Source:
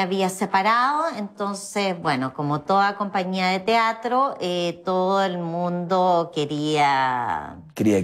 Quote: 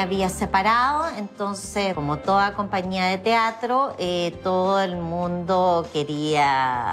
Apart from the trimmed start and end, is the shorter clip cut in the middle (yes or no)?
yes